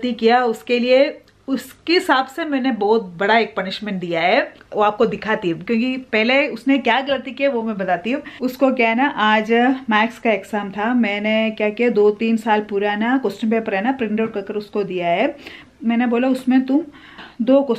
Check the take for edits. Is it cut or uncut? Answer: uncut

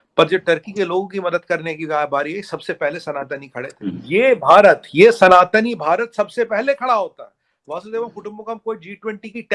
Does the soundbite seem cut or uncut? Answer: cut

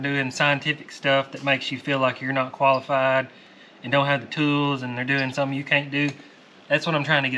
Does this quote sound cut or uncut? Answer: uncut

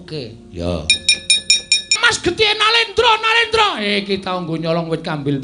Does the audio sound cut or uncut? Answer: cut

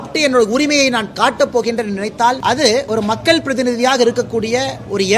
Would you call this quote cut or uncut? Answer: cut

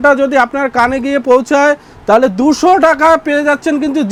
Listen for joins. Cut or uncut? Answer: uncut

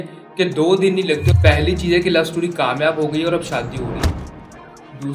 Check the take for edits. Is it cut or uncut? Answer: cut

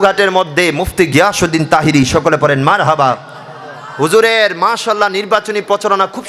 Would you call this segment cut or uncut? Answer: uncut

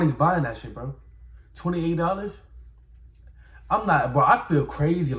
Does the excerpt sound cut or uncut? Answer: uncut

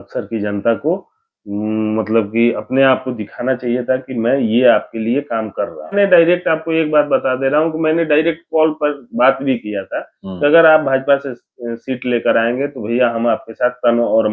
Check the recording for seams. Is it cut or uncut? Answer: cut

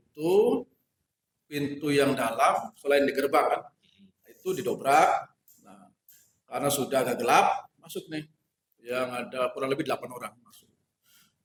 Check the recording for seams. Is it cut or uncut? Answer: uncut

